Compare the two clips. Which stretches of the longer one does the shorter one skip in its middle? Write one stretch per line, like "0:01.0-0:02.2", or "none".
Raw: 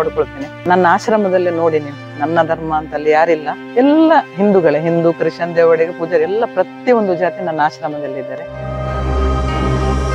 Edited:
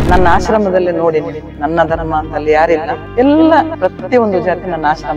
0:04.3-0:06.5